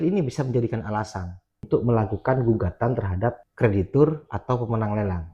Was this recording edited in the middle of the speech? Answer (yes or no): yes